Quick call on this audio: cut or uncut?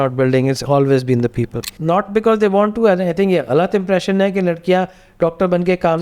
cut